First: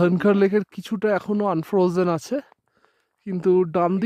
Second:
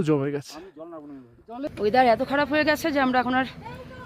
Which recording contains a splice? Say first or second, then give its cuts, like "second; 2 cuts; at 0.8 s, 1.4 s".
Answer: second; 1 cut; at 1.7 s